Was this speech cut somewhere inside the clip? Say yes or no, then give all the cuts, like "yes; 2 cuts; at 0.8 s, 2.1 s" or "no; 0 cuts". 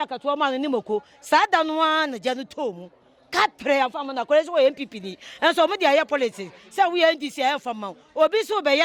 no; 0 cuts